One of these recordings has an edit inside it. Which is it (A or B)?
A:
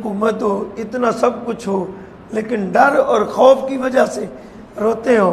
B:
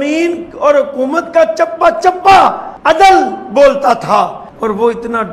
B